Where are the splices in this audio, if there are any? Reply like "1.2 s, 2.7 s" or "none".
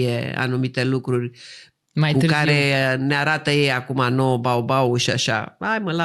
none